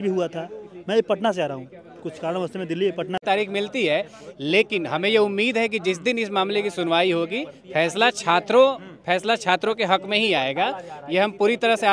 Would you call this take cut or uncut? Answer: cut